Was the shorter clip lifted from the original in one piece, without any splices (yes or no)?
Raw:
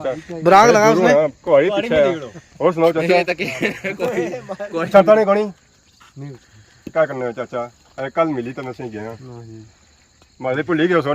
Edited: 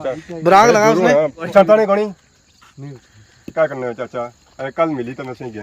no